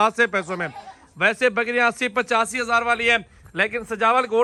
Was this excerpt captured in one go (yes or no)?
yes